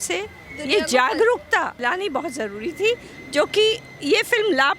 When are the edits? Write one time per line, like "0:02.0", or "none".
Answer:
0:01.8